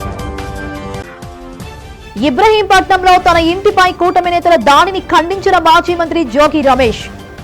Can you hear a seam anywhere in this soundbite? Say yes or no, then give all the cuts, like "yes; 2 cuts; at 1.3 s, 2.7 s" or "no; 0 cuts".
no; 0 cuts